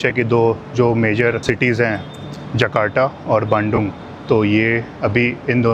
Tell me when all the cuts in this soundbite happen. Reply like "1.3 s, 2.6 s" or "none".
1.4 s